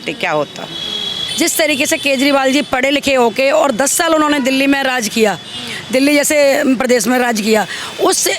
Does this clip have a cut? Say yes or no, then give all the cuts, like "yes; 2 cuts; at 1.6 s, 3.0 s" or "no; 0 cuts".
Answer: yes; 1 cut; at 1.1 s